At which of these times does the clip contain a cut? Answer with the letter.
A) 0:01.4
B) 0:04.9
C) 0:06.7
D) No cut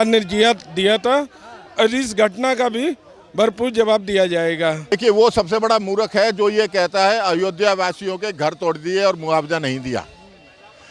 B